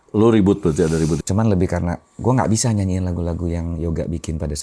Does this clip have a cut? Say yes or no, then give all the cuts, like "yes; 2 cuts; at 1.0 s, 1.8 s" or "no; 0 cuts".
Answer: yes; 1 cut; at 1.2 s